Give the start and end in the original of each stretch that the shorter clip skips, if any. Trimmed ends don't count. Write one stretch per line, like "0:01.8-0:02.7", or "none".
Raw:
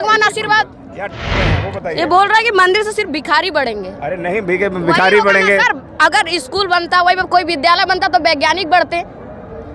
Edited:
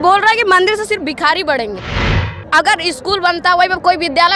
0:04.3-0:05.7